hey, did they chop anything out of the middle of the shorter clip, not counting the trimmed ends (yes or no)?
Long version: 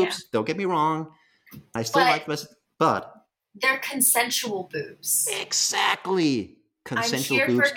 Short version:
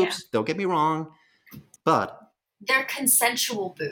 yes